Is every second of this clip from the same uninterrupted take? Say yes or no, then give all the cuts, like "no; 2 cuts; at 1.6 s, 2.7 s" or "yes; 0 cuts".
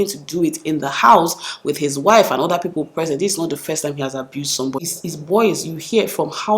no; 1 cut; at 4.9 s